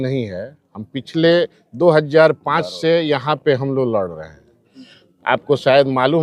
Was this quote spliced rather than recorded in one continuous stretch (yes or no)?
no